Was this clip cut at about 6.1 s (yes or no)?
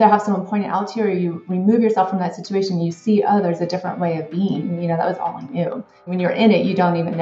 yes